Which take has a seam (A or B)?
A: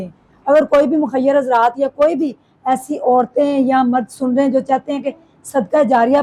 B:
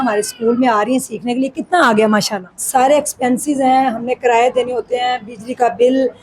B